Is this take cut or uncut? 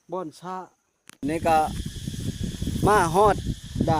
cut